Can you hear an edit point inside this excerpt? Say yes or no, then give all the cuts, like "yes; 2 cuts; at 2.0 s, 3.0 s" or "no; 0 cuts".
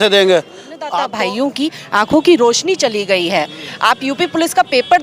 yes; 1 cut; at 1.0 s